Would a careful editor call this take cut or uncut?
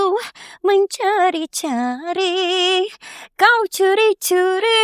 uncut